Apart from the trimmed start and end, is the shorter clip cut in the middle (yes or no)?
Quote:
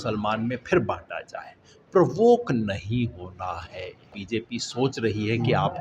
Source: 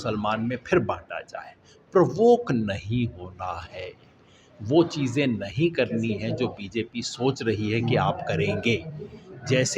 yes